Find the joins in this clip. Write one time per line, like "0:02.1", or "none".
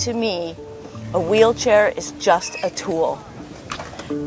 none